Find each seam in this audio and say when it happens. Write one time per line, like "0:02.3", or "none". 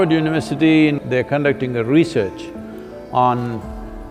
0:01.0